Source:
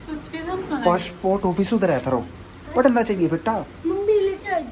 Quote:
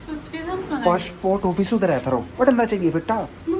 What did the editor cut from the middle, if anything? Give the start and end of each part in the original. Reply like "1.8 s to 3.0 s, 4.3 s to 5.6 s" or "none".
2.3 s to 2.7 s